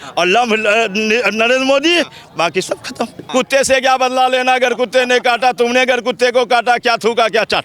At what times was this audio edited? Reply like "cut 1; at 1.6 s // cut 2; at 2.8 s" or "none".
cut 1; at 3.2 s